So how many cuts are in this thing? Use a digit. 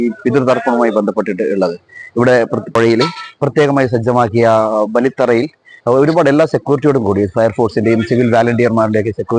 1